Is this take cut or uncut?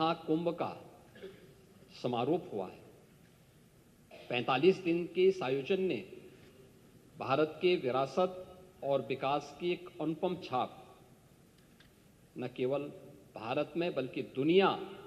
uncut